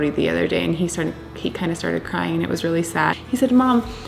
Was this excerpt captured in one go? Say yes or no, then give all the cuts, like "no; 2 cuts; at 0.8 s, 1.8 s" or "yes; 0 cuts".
yes; 0 cuts